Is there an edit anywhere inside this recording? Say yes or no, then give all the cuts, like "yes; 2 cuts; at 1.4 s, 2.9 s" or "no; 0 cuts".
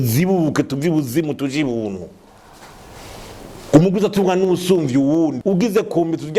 no; 0 cuts